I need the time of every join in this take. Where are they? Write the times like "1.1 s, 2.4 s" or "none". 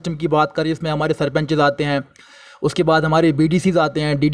none